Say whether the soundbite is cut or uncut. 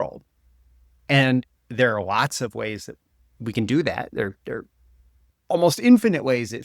uncut